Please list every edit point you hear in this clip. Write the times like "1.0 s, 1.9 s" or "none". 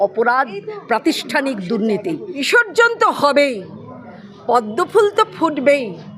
2.4 s